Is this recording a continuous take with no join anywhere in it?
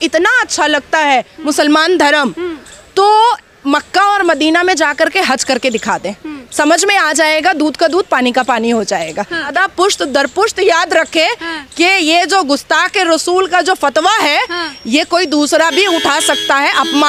yes; 0 cuts

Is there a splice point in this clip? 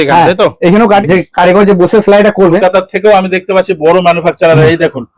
yes; 2 cuts; at 1.0 s, 2.6 s

